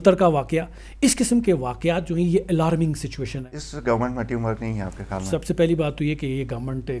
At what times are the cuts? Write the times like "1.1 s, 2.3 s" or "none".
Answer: 3.4 s